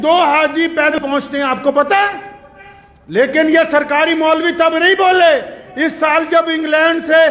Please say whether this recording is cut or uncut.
cut